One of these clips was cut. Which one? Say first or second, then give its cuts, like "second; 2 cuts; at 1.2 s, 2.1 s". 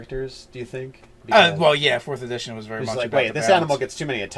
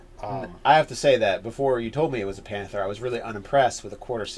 first; 1 cut; at 1.0 s